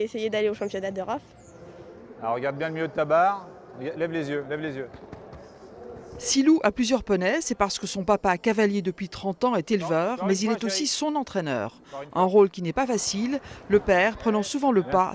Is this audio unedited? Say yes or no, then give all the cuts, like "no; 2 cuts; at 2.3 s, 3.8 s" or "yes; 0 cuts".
no; 1 cut; at 12.6 s